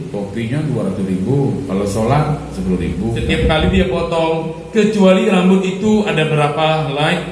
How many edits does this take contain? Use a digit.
1